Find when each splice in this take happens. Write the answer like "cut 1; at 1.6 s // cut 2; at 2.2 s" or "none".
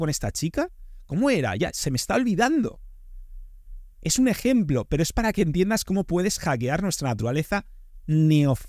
none

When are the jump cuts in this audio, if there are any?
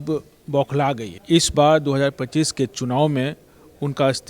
cut 1; at 1.1 s

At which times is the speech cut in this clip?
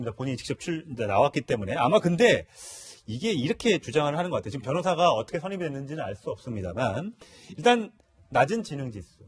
none

